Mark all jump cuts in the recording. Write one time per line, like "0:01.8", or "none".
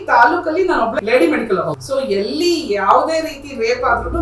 0:01.0
0:01.8